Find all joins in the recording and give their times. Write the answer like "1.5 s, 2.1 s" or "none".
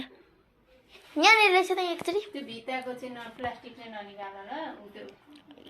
1.0 s